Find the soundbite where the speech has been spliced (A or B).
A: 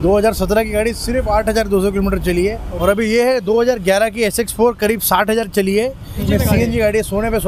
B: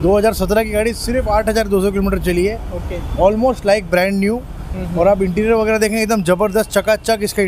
A